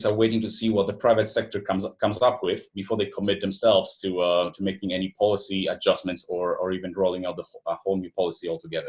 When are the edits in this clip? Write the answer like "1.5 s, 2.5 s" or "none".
none